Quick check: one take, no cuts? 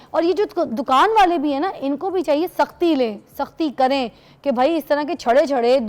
yes; 0 cuts

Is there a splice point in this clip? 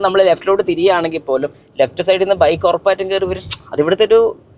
no; 0 cuts

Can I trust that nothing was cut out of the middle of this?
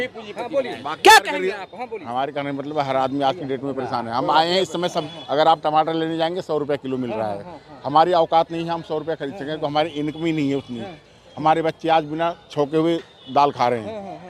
no; 1 cut; at 5.1 s

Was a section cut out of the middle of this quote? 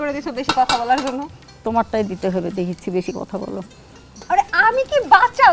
no; 0 cuts

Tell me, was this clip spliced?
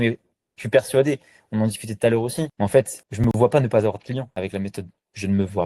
no; 0 cuts

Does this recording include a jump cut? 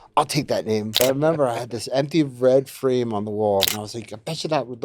yes; 2 cuts; at 1.0 s, 3.7 s

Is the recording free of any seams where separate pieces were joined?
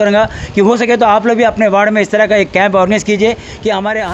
yes; 0 cuts

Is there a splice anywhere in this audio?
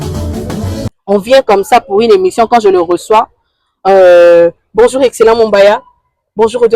yes; 1 cut; at 0.9 s

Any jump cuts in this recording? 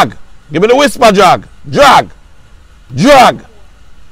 no; 0 cuts

